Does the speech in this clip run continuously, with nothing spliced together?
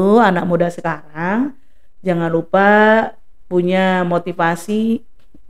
yes; 0 cuts

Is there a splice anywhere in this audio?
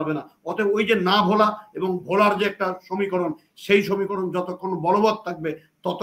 no; 0 cuts

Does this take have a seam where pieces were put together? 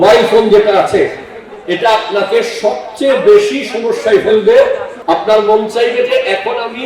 yes; 1 cut; at 4.9 s

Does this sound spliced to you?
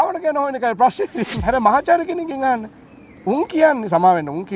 yes; 1 cut; at 1.3 s

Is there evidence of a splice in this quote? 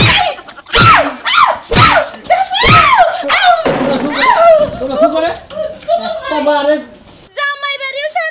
yes; 1 cut; at 7.0 s

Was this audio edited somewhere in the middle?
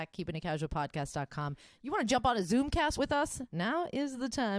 yes; 1 cut; at 1.7 s

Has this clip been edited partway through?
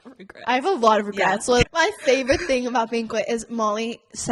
yes; 1 cut; at 1.6 s

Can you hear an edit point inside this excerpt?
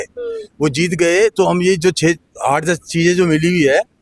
no; 0 cuts

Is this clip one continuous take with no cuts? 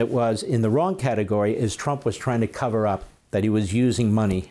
no; 1 cut; at 3.1 s

